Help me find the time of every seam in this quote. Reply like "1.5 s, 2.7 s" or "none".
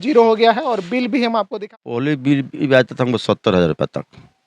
1.6 s